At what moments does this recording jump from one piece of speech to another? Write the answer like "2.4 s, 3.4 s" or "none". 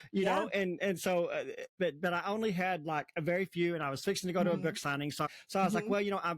1.7 s, 5.3 s